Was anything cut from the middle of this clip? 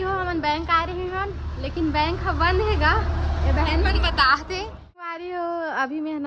yes; 1 cut; at 5.2 s

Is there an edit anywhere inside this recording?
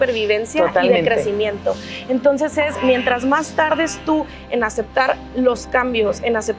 no; 0 cuts

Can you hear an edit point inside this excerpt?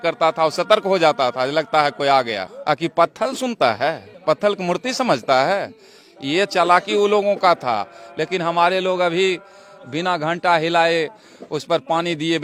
no; 0 cuts

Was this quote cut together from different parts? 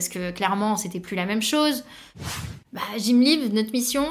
yes; 1 cut; at 2.1 s

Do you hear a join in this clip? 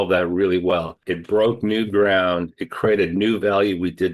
yes; 1 cut; at 1.1 s

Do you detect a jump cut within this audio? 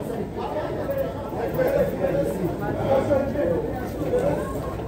no; 0 cuts

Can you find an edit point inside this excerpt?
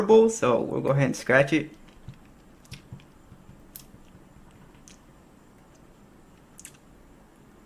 no; 0 cuts

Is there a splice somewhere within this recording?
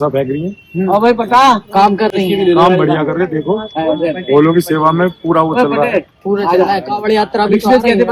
no; 0 cuts

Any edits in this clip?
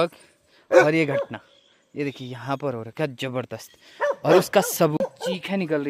yes; 1 cut; at 5.0 s

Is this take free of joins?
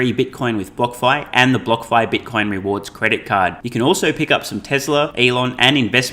no; 1 cut; at 5.1 s

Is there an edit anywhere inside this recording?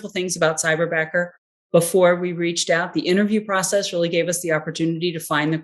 no; 0 cuts

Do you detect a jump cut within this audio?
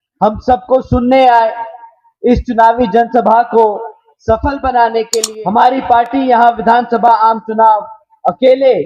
yes; 1 cut; at 5.1 s

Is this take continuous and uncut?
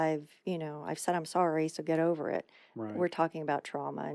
yes; 0 cuts

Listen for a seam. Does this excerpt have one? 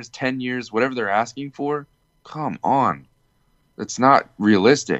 no; 0 cuts

